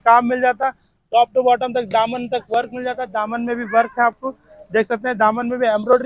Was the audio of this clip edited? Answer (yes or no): no